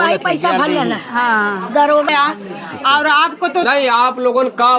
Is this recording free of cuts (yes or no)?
no